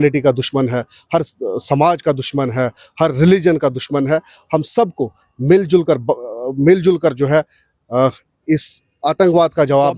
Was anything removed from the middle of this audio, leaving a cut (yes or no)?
no